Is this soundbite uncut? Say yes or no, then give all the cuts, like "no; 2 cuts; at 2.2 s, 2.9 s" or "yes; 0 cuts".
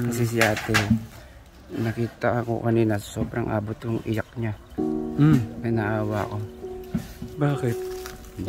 yes; 0 cuts